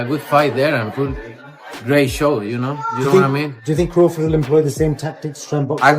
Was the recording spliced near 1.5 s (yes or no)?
yes